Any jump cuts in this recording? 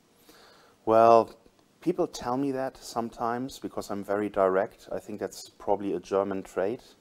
no; 0 cuts

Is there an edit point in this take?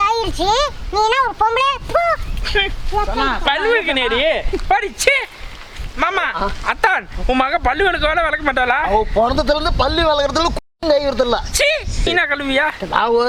no; 0 cuts

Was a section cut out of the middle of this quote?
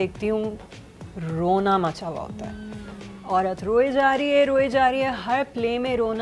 no; 0 cuts

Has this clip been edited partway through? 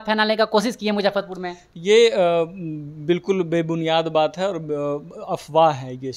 no; 0 cuts

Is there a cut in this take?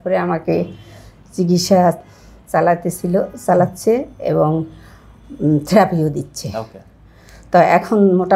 no; 0 cuts

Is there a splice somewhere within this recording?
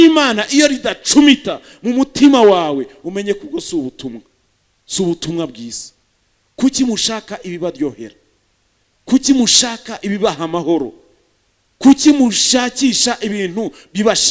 no; 0 cuts

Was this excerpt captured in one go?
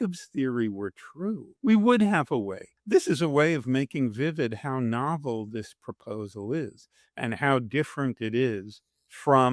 no; 2 cuts; at 1.5 s, 2.8 s

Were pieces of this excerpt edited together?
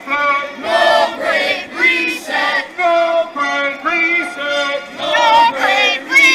no; 0 cuts

